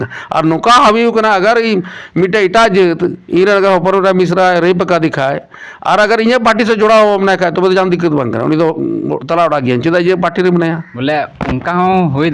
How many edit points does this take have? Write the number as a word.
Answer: one